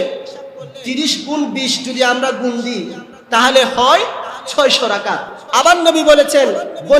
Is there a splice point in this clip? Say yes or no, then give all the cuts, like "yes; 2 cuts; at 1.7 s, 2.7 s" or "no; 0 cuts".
yes; 1 cut; at 5.3 s